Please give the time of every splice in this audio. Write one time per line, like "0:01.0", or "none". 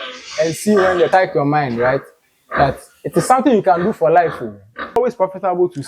0:01.1
0:05.0